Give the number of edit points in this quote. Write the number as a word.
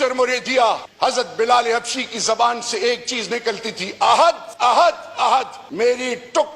three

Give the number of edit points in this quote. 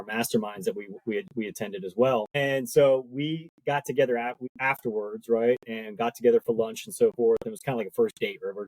two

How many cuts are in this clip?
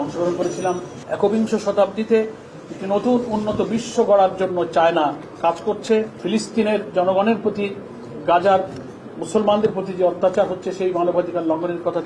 two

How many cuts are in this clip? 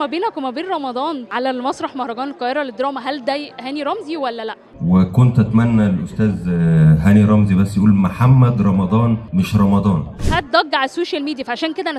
three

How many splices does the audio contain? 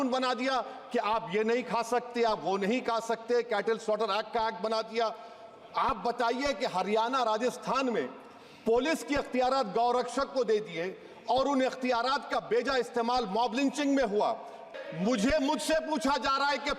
one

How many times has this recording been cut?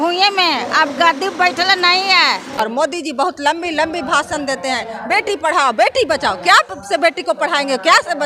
one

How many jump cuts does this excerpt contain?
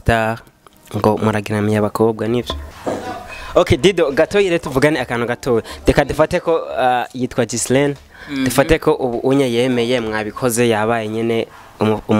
one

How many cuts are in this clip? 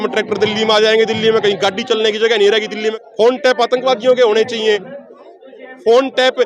one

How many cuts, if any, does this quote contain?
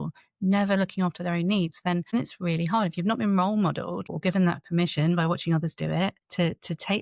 zero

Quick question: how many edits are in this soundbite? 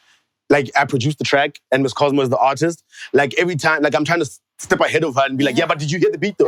zero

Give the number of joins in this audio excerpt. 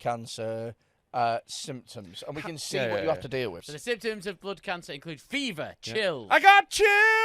one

